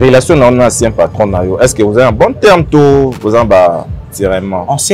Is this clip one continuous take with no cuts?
yes; 0 cuts

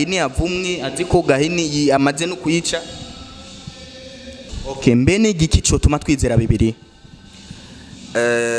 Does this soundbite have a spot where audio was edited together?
yes; 1 cut; at 4.5 s

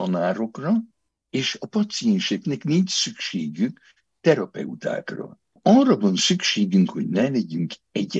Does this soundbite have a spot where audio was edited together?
yes; 2 cuts; at 5.6 s, 7.2 s

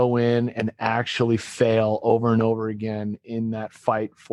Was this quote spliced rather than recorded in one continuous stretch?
no; 0 cuts

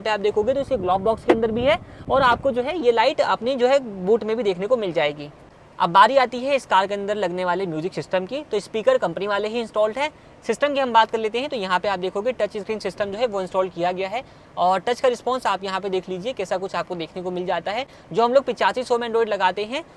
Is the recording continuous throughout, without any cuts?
yes; 0 cuts

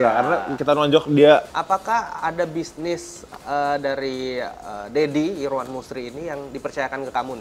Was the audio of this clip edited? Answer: yes; 1 cut; at 1.5 s

